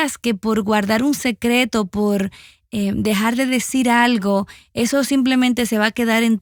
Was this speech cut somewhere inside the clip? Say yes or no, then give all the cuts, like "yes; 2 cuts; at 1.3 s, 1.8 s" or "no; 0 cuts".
no; 0 cuts